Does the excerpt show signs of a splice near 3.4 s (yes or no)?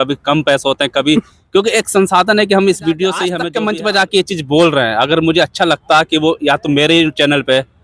yes